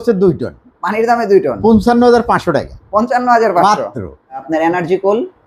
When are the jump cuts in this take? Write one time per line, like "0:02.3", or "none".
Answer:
0:04.4

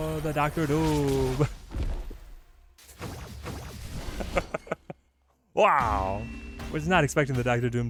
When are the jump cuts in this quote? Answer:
none

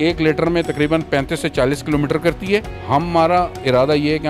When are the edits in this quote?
0:02.7

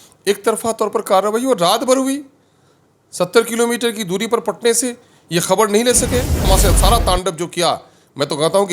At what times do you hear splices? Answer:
0:06.5

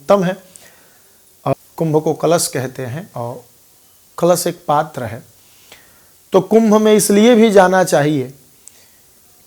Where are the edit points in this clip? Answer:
0:01.5

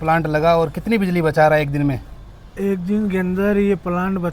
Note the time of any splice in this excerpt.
none

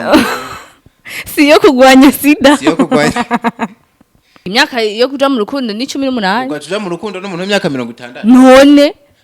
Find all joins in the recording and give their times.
0:04.5

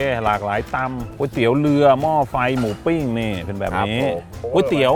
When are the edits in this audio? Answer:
none

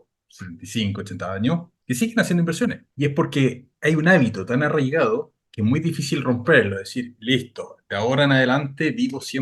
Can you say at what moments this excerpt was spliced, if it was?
0:01.7
0:02.9
0:03.7
0:05.4

